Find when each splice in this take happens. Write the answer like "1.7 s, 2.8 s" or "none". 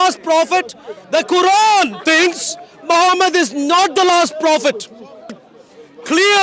5.5 s